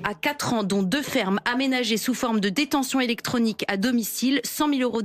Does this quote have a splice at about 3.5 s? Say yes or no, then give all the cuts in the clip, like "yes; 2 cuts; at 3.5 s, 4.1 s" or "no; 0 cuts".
no; 0 cuts